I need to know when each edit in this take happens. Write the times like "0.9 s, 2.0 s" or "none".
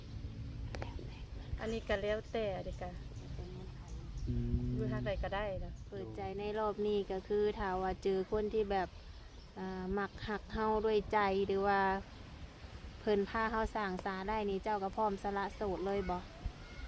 6.1 s